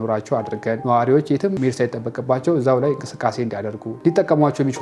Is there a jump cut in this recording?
yes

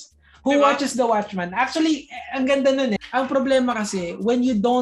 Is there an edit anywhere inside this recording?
yes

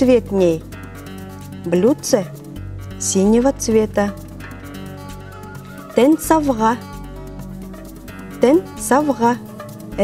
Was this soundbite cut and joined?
yes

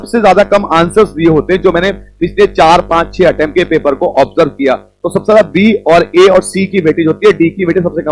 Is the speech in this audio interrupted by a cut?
no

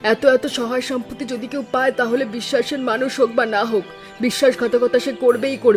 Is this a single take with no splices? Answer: yes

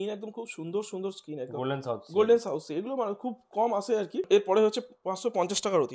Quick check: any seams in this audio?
no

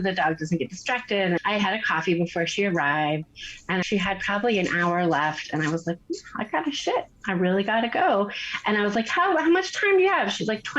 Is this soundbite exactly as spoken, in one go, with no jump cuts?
no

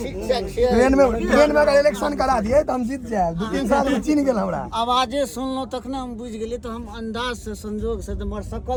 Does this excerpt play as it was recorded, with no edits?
yes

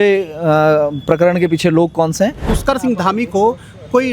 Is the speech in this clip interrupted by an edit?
yes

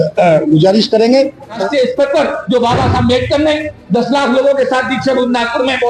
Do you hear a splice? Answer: yes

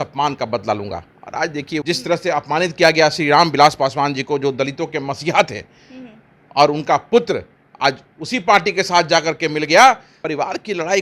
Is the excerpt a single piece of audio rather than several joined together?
no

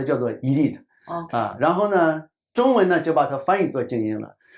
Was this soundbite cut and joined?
no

